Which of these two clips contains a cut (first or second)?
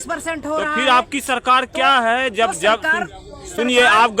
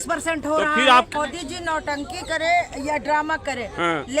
second